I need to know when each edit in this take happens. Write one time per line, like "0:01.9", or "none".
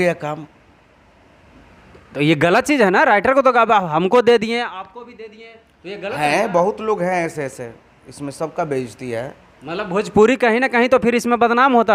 none